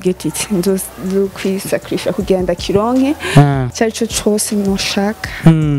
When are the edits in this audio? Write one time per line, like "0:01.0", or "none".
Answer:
0:03.7

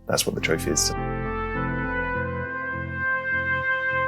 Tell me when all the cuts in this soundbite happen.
0:00.9

